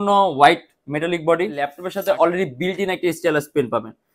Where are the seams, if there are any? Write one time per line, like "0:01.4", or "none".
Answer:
0:01.9